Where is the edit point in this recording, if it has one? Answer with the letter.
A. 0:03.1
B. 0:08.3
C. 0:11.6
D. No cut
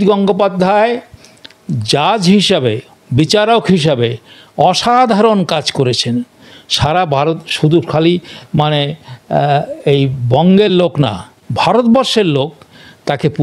D